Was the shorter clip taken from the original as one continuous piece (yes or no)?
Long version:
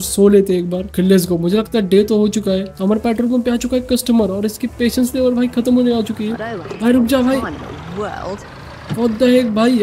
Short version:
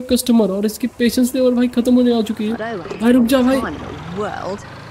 yes